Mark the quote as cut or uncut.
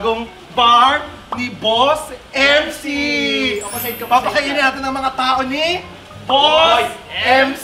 uncut